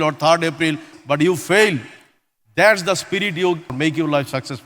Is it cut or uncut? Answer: cut